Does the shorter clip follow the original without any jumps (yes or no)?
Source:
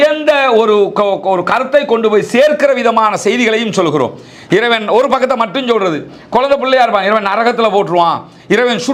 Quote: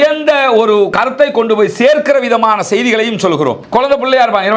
no